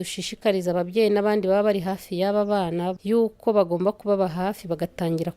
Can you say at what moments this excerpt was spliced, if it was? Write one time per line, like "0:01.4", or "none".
0:03.0